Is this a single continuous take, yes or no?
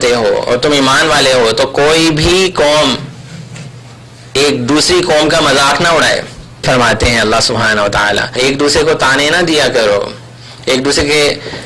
no